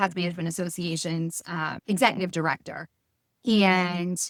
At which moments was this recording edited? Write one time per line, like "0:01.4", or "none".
none